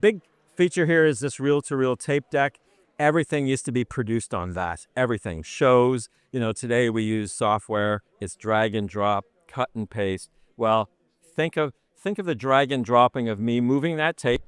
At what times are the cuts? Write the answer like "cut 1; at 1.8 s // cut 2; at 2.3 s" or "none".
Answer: cut 1; at 2.8 s